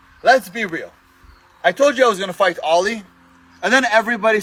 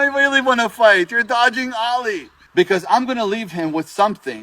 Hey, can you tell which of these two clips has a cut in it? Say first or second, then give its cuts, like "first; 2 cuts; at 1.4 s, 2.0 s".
second; 1 cut; at 2.3 s